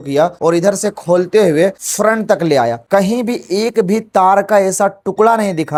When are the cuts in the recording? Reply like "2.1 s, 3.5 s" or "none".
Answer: none